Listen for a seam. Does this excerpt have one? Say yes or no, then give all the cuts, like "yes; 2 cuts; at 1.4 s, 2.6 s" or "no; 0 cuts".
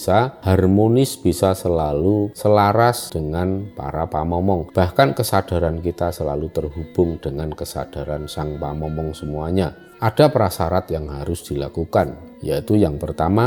no; 0 cuts